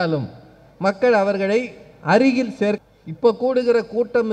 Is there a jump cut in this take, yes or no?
yes